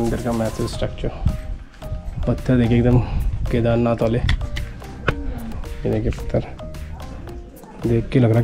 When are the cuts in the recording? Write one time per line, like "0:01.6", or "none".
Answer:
none